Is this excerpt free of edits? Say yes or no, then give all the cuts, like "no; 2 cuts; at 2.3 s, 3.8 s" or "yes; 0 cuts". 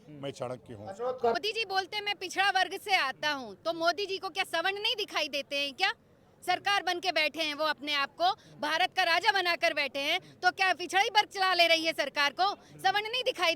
no; 1 cut; at 1.4 s